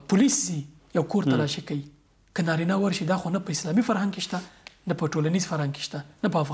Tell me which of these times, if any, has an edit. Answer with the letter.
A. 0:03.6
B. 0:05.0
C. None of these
C